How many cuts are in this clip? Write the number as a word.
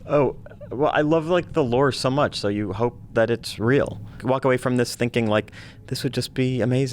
one